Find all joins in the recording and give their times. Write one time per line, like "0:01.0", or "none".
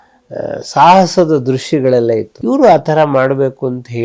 0:02.3